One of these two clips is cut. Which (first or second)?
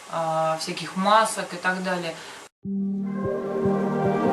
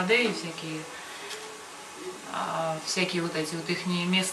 first